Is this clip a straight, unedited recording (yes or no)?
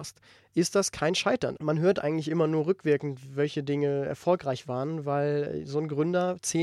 no